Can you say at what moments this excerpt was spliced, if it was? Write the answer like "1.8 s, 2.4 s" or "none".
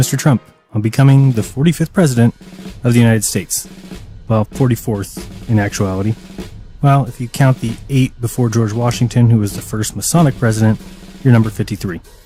none